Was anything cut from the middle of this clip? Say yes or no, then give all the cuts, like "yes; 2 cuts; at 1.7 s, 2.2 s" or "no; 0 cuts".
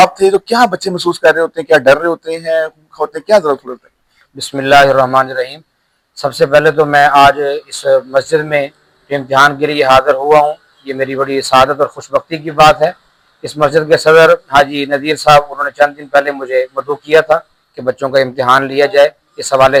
no; 0 cuts